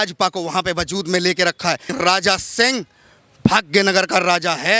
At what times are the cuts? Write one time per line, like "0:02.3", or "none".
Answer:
0:01.9